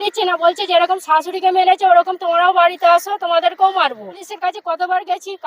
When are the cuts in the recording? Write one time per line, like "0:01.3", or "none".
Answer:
0:04.3